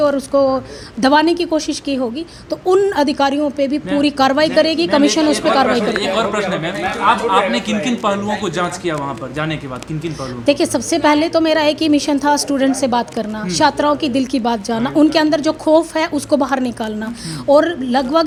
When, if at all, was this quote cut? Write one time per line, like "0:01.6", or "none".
none